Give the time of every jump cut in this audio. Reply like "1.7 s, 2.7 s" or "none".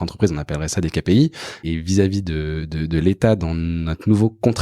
1.6 s